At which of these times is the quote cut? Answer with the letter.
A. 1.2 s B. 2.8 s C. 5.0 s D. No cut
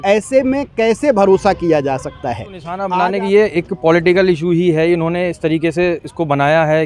B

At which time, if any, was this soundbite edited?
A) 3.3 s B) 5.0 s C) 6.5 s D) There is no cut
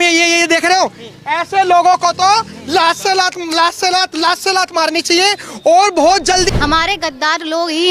C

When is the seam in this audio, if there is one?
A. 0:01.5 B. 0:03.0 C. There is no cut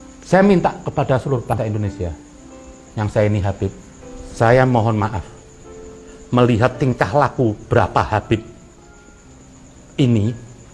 A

